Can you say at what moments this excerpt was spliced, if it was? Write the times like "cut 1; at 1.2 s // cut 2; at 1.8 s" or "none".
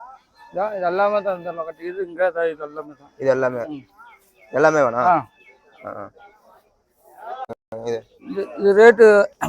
cut 1; at 7.5 s